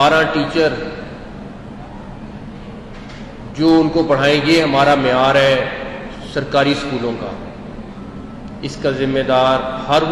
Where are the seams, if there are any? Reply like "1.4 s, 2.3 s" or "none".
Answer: none

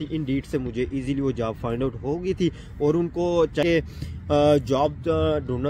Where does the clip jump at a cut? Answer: 3.6 s

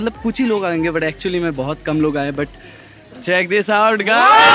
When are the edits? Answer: none

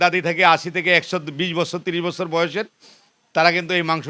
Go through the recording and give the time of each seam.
none

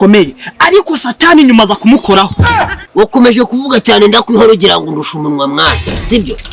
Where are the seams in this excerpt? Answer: 2.9 s

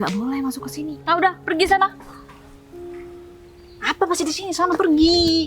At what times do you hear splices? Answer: 1.0 s

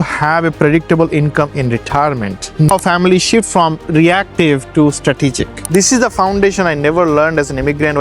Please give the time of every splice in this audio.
2.7 s, 5.5 s

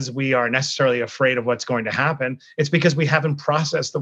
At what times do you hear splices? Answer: none

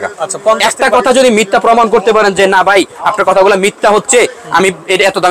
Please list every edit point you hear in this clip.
none

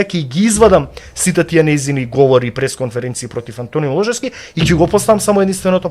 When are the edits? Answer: none

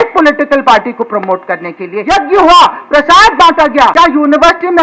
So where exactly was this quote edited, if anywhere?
1.9 s, 3.9 s

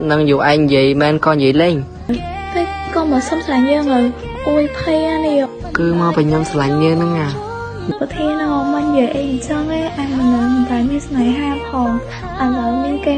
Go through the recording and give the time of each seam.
2.1 s, 7.9 s

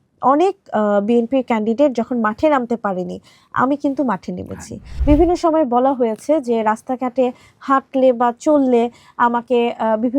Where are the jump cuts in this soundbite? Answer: 4.9 s

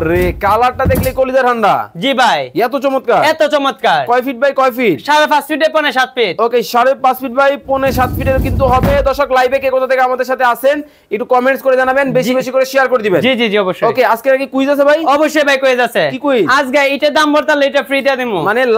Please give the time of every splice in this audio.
none

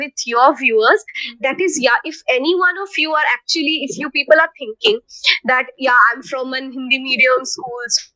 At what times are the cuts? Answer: none

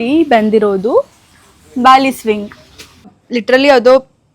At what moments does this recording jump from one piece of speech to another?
3.2 s

